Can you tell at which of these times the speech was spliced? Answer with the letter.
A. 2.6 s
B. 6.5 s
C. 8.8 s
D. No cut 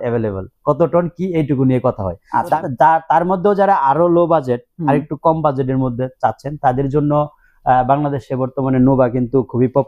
A